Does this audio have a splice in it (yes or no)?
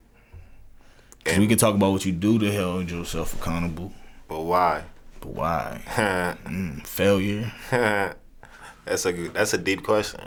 no